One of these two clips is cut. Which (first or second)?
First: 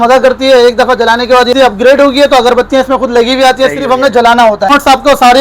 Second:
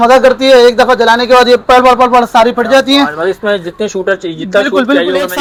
first